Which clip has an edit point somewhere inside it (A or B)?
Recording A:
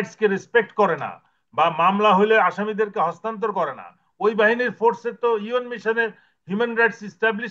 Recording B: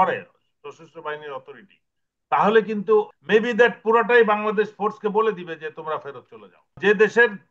B